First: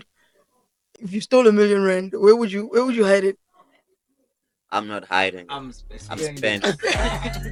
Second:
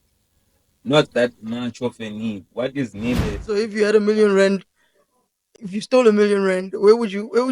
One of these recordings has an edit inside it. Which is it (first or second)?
second